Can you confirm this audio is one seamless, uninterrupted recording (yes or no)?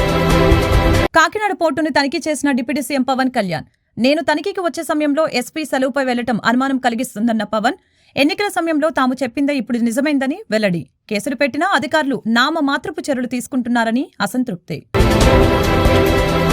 no